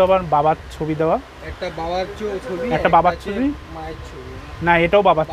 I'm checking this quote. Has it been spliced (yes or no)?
no